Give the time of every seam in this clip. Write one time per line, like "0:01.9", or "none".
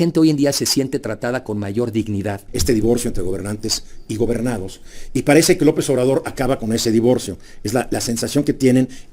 0:02.5

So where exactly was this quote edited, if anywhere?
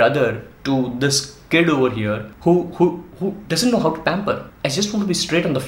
0:02.3
0:04.5

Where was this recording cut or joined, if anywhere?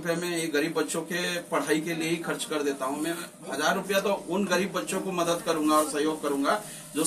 none

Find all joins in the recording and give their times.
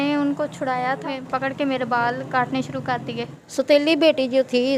0:01.2
0:03.4

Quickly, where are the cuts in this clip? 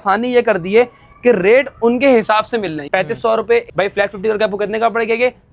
0:02.8
0:03.7

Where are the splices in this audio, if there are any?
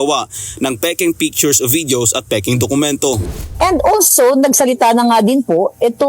0:03.3

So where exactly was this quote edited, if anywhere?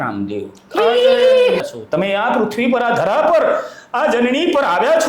0:01.7

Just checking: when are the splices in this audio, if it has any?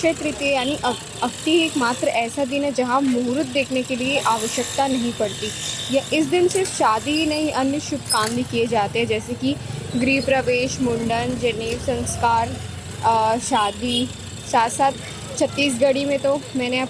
none

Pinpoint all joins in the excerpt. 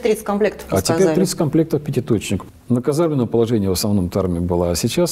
0:02.5

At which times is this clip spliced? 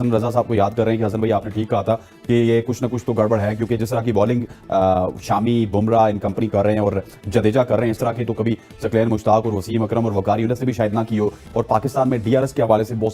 0:11.4

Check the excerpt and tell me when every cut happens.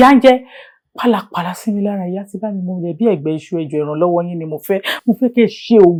none

